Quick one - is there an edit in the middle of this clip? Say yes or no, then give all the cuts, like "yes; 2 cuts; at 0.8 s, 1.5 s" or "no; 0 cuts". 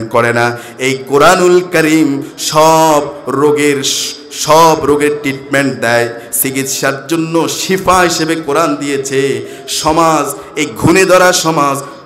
no; 0 cuts